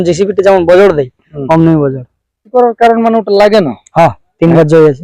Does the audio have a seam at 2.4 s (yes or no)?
yes